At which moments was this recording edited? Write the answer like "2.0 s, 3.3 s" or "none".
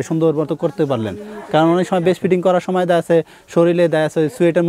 none